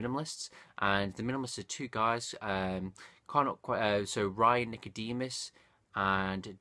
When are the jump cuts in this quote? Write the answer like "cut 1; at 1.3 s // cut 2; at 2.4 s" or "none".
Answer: cut 1; at 5.1 s